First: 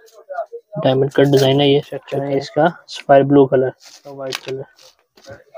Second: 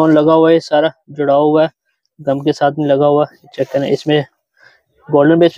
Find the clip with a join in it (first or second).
first